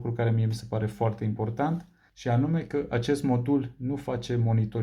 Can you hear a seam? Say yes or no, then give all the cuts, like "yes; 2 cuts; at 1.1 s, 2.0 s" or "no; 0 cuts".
no; 0 cuts